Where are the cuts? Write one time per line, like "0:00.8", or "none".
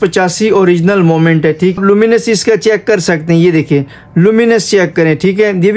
0:01.8

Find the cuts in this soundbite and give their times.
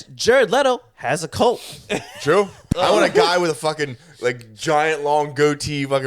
0:02.6

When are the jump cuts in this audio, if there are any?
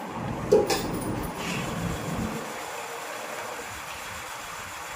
0:01.4

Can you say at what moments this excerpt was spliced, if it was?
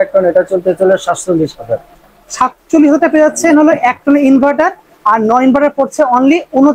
none

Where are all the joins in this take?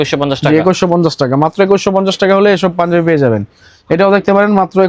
none

